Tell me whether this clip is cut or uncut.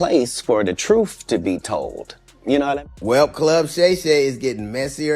cut